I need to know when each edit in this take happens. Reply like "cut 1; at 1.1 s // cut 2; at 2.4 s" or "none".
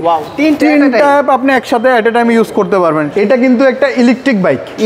cut 1; at 3.1 s